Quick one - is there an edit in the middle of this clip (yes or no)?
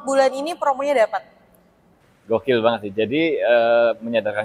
yes